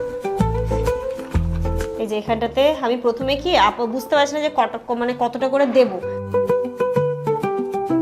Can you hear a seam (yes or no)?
yes